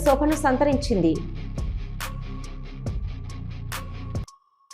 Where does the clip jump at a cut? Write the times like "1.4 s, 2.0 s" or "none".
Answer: none